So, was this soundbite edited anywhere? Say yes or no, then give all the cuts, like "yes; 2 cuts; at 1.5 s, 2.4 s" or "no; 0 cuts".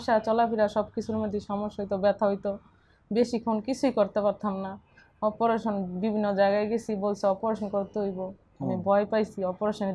no; 0 cuts